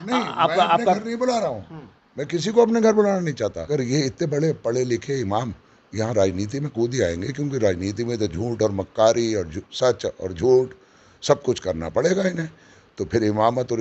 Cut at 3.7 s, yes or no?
yes